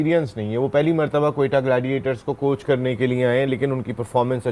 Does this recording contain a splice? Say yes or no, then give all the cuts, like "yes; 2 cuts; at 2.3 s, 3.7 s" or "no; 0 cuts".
no; 0 cuts